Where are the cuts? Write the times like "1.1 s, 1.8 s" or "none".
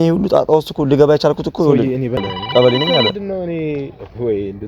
2.2 s